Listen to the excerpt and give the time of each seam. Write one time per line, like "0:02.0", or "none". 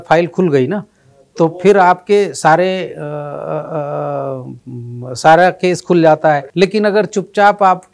none

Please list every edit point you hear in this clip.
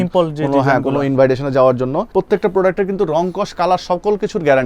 0:02.1

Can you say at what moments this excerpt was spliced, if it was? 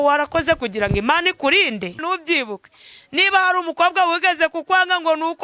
0:02.0

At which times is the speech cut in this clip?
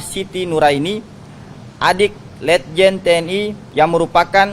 0:03.6

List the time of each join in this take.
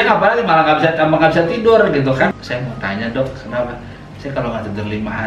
0:02.3

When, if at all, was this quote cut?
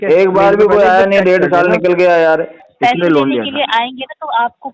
0:02.6

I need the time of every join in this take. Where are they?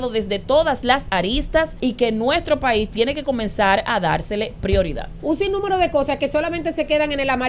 0:01.7
0:05.1

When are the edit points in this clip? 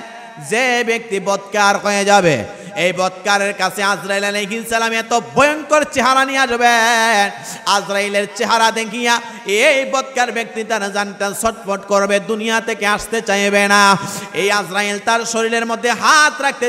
none

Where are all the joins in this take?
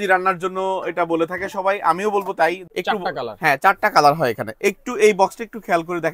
0:02.7

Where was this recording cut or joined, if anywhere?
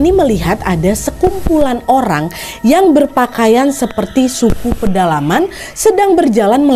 none

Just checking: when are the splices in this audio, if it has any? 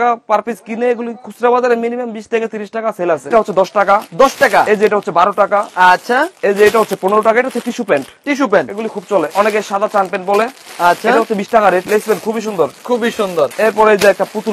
0:03.3
0:09.3
0:11.8
0:13.5

